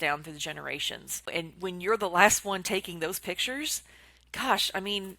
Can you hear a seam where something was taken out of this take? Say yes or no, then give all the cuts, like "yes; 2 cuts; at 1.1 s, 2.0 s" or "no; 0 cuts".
yes; 1 cut; at 1.3 s